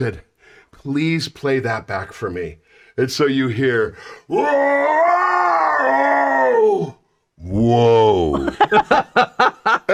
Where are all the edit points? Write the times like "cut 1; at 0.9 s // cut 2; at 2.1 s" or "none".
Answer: none